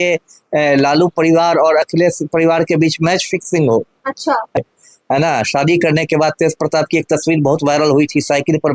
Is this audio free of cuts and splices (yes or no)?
no